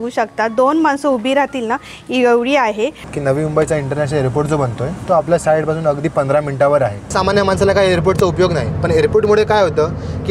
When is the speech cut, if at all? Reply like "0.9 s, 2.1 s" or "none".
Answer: 3.0 s, 7.0 s